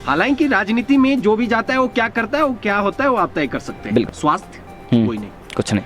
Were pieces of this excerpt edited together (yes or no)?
yes